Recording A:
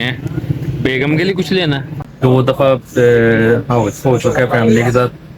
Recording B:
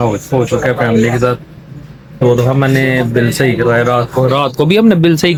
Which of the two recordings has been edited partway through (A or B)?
A